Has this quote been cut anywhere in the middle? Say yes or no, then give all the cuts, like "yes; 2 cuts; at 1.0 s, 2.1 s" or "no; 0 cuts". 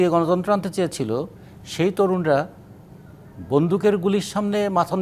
no; 0 cuts